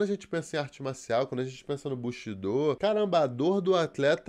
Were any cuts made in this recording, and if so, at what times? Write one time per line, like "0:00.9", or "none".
0:02.8